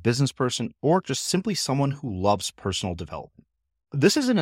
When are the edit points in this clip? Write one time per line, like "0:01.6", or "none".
none